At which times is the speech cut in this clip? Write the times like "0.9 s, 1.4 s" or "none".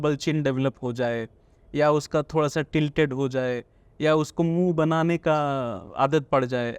5.8 s